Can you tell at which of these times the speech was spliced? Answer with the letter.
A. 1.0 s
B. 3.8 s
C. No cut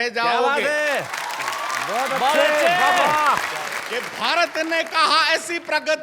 B